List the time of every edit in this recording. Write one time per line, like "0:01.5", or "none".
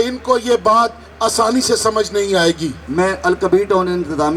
0:02.8